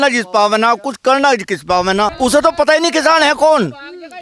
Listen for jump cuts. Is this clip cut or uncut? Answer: cut